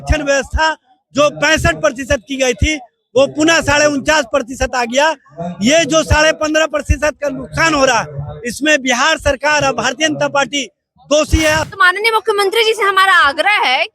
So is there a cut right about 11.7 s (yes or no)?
yes